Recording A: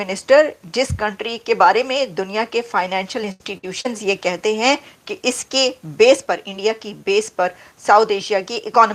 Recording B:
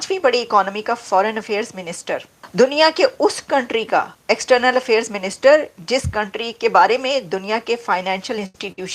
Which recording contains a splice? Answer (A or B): B